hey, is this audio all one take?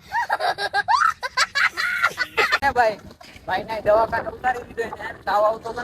yes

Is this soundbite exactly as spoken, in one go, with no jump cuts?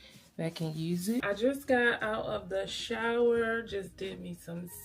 no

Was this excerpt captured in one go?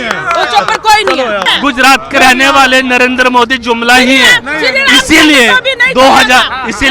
no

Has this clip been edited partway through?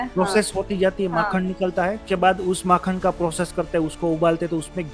yes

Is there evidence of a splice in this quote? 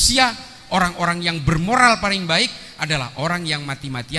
no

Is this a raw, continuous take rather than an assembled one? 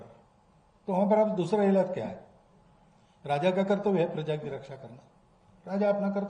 yes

